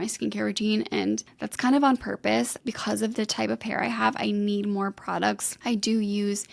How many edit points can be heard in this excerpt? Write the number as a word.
two